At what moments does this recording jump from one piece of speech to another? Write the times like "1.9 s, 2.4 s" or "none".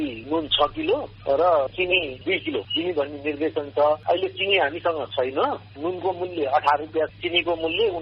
2.3 s, 4.0 s, 7.1 s